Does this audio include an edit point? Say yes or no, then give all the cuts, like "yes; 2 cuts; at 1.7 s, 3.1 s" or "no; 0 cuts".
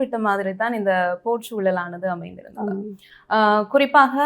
no; 0 cuts